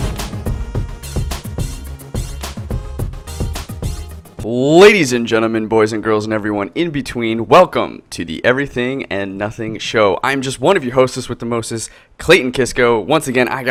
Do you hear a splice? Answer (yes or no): no